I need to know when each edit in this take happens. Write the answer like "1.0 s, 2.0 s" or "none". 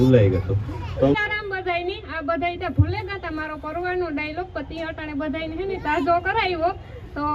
1.2 s